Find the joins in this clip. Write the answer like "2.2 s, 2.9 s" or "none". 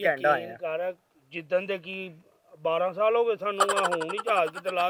none